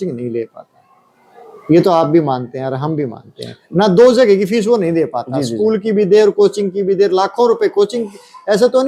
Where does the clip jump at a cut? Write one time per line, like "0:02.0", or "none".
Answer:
none